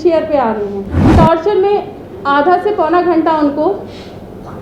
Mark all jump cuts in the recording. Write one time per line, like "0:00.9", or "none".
0:01.1